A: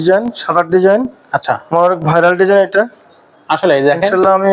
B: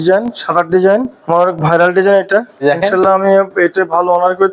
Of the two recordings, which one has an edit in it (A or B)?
B